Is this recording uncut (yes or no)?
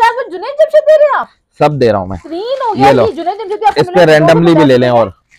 yes